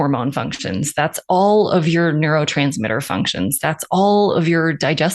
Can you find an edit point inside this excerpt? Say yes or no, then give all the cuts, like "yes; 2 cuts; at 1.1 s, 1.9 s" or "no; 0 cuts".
no; 0 cuts